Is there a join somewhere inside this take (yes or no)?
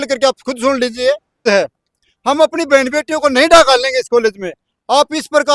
yes